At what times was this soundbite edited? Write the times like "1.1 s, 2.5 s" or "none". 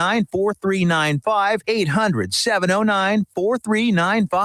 1.5 s